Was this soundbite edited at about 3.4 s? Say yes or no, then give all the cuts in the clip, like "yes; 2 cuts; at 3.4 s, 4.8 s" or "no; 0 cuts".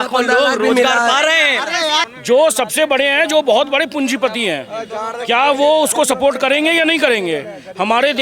no; 1 cut; at 2.1 s